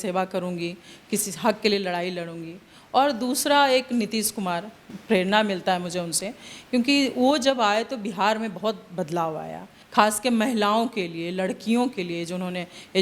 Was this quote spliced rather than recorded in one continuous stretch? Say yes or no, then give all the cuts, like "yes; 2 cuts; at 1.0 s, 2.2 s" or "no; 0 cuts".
no; 0 cuts